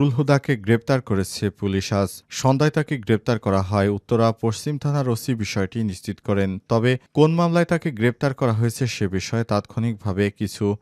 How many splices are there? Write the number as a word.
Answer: zero